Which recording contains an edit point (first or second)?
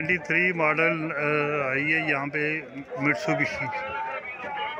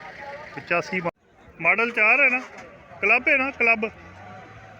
second